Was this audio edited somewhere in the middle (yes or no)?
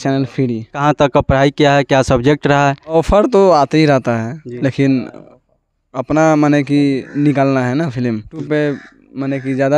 yes